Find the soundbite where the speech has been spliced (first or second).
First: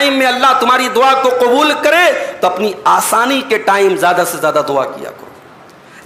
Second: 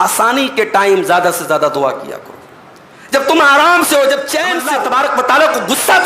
second